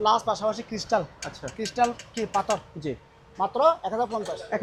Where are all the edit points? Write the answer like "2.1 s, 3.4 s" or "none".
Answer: none